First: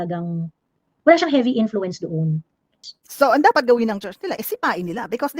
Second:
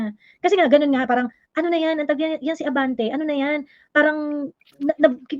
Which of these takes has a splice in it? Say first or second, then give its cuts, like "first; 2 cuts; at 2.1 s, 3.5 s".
first; 1 cut; at 2.8 s